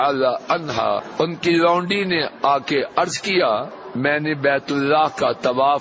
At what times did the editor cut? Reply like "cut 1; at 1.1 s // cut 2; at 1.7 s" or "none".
cut 1; at 1.1 s // cut 2; at 3.8 s

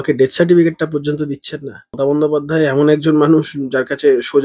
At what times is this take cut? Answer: cut 1; at 2.0 s

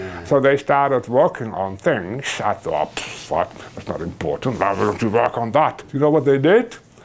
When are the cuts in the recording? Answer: cut 1; at 5.8 s

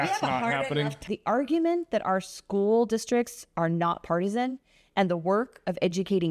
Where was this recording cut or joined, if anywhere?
cut 1; at 1.0 s

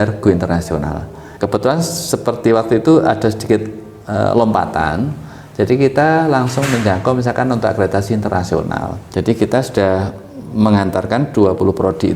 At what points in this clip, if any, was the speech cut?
cut 1; at 1.2 s // cut 2; at 9.0 s

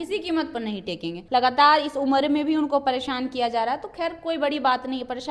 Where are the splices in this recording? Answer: cut 1; at 1.2 s

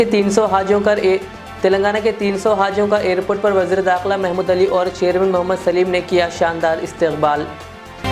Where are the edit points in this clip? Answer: none

